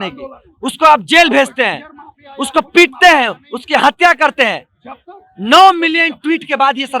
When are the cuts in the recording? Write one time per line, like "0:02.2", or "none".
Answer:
none